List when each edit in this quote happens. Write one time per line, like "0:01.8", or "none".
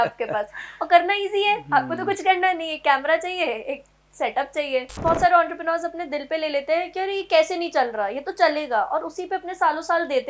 0:04.9